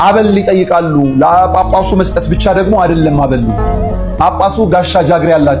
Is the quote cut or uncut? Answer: uncut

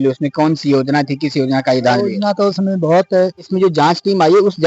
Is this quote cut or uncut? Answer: cut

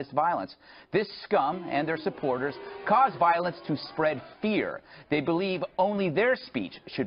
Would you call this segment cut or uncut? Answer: cut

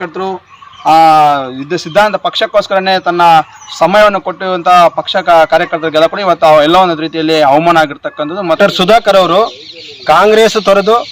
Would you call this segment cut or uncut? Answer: cut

